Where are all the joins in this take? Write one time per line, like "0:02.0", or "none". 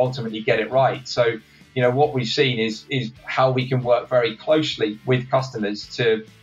none